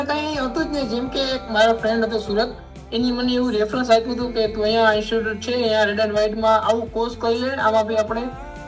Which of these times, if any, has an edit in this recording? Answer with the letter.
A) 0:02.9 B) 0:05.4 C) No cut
C